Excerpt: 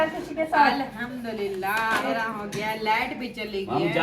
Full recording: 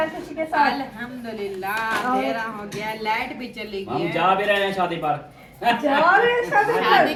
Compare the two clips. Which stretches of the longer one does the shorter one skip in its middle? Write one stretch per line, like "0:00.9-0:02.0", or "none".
0:02.0-0:02.2